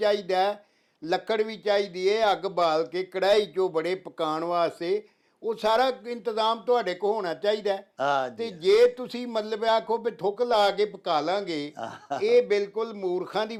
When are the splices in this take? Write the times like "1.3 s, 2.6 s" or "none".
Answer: none